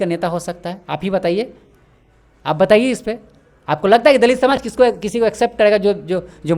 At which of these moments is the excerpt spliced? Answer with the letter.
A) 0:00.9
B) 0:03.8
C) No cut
C